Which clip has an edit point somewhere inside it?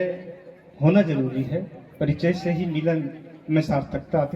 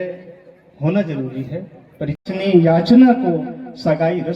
second; 1 cut; at 2.2 s

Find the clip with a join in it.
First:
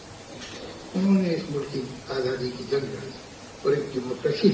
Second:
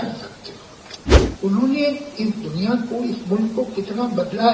second; 1 cut; at 1.3 s

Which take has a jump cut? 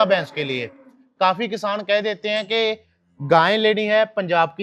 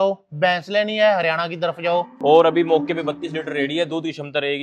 second; 1 cut; at 2.1 s

